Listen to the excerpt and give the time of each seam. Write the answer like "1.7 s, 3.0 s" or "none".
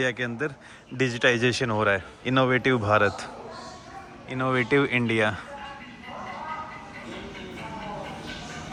none